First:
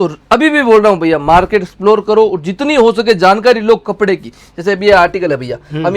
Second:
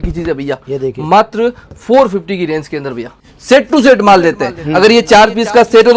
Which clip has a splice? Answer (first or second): second